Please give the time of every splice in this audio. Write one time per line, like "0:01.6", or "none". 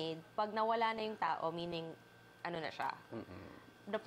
none